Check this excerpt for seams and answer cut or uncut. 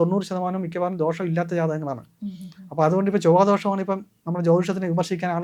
uncut